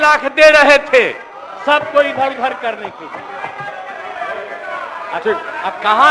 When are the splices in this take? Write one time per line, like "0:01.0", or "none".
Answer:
none